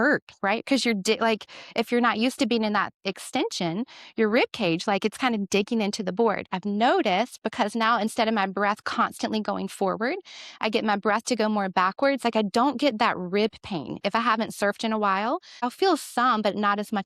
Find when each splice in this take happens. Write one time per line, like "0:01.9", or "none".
0:15.7

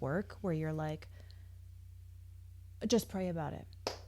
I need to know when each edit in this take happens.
none

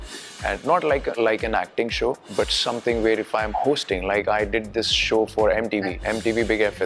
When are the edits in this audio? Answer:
0:01.2
0:02.2
0:06.0

